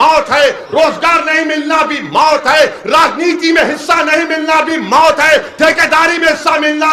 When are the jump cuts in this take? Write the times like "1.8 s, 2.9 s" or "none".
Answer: none